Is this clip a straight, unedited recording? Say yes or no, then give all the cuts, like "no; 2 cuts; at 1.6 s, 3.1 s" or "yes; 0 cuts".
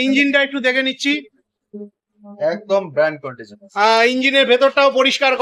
yes; 0 cuts